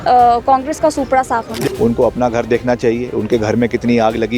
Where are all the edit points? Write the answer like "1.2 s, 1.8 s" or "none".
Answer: 1.5 s